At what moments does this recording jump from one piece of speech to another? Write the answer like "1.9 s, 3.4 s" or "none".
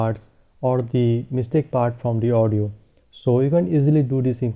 2.7 s